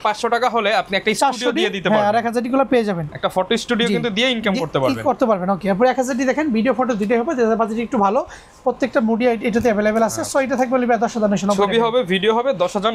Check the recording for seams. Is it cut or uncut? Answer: uncut